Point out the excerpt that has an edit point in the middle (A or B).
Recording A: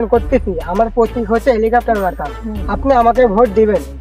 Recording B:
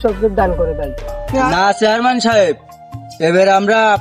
B